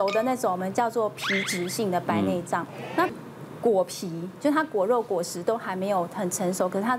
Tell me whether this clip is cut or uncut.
cut